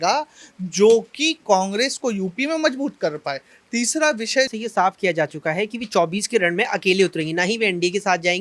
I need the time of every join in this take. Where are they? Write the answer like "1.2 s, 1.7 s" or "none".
4.5 s